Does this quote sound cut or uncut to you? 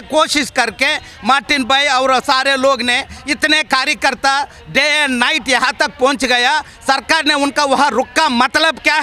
uncut